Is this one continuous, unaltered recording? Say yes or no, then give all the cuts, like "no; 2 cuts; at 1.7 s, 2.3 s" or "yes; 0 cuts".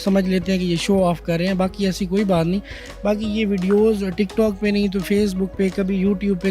yes; 0 cuts